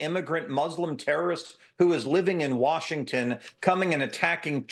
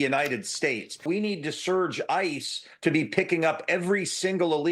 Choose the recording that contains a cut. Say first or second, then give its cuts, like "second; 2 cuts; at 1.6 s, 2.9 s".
second; 1 cut; at 1.0 s